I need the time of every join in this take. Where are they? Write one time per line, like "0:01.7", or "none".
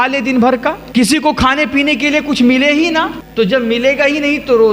0:00.8
0:03.2